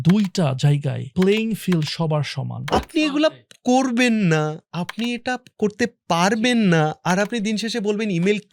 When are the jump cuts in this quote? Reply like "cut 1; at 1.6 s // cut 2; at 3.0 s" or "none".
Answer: cut 1; at 1.0 s // cut 2; at 2.7 s